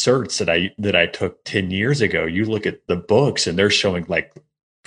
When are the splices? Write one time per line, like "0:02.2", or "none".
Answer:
0:02.8